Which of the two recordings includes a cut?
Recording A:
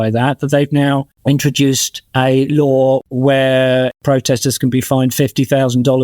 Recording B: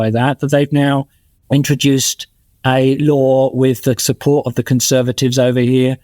A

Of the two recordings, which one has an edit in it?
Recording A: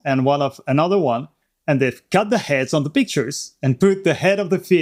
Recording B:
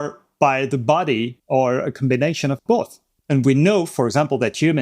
B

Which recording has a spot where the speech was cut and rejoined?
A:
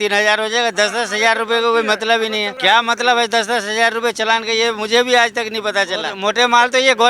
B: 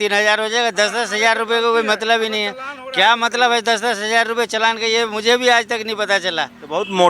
A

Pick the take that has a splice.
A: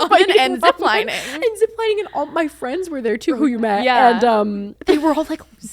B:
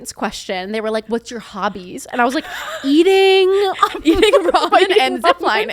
A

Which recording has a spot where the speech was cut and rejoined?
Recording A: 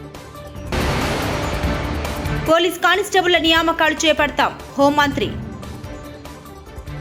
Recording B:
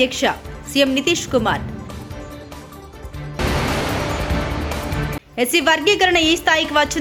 A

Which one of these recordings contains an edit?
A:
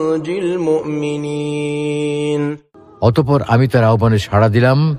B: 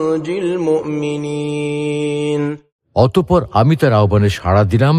B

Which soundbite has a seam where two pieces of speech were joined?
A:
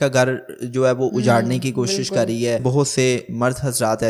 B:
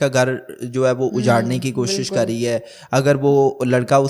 A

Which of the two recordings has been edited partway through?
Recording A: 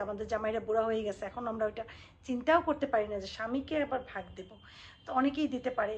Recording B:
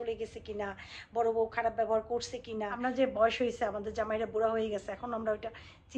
B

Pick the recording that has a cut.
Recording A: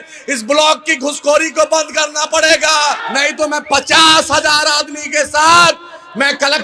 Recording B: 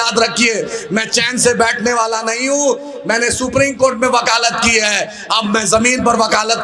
A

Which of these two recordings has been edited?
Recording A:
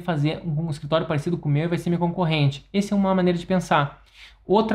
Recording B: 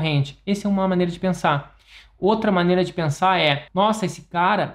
B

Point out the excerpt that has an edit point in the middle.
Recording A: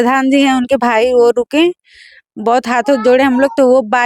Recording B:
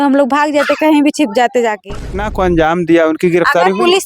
B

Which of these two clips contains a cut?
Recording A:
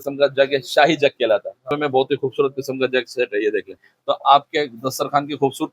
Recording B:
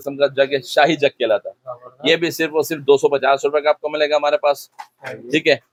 A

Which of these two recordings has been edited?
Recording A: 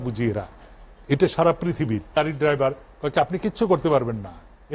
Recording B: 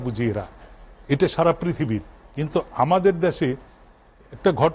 A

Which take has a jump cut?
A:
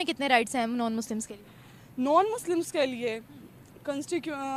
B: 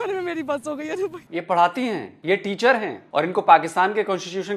B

